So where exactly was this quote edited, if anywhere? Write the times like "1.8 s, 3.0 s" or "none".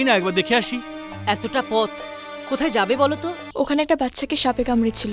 3.4 s